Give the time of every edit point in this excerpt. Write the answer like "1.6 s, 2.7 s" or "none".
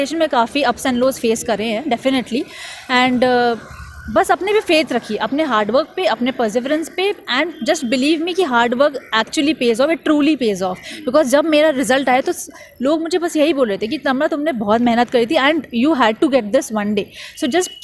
none